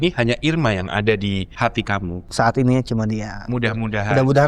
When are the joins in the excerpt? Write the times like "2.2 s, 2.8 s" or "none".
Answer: 1.8 s